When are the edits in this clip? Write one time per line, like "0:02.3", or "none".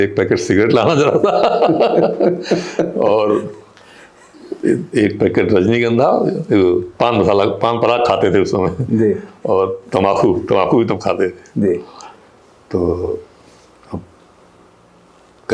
none